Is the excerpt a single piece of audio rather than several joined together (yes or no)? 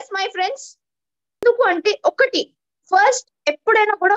no